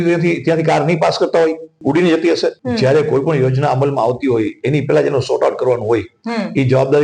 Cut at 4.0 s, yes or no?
no